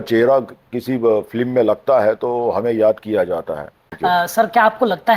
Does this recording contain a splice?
yes; 1 cut; at 4.0 s

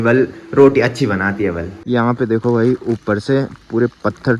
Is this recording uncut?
no; 1 cut; at 1.7 s

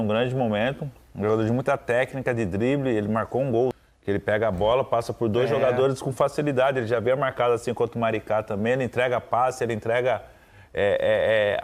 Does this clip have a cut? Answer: no; 0 cuts

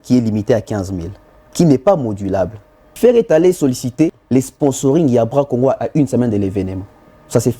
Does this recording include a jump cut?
yes; 2 cuts; at 2.8 s, 4.2 s

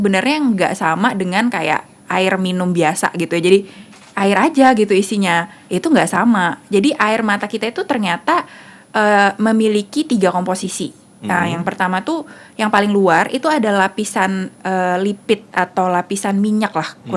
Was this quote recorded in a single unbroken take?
yes; 0 cuts

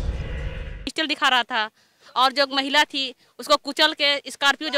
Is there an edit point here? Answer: yes; 1 cut; at 0.9 s

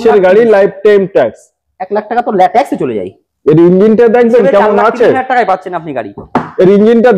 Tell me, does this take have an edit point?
no; 0 cuts

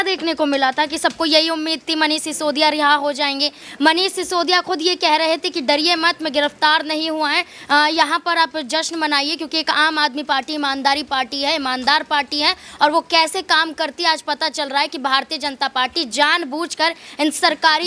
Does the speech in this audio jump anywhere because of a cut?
no; 0 cuts

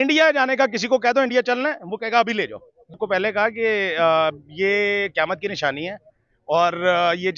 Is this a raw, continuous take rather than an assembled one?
no; 1 cut; at 3.0 s

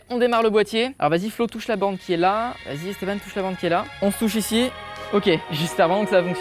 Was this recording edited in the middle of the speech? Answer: yes; 4 cuts; at 0.9 s, 2.7 s, 3.9 s, 5.5 s

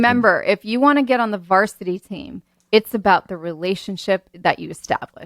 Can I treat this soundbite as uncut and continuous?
no; 1 cut; at 4.3 s

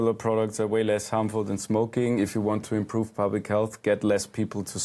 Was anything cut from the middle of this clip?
no; 0 cuts

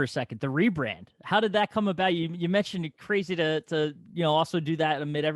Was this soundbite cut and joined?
no; 0 cuts

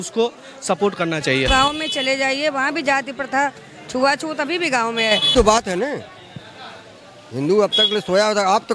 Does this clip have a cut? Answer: yes; 2 cuts; at 1.5 s, 5.3 s

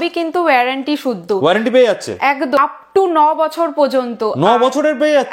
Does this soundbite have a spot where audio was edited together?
yes; 1 cut; at 2.6 s

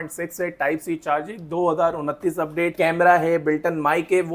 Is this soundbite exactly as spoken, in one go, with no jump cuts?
yes; 0 cuts

